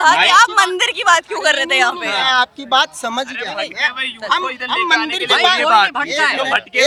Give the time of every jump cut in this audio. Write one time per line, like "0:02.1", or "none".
none

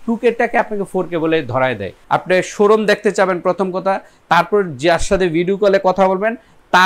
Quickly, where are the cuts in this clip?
0:02.0

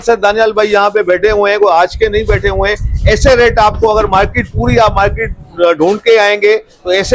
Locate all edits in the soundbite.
none

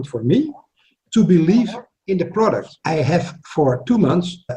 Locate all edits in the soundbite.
0:02.7

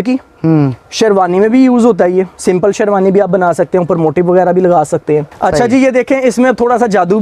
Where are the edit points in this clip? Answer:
0:05.3

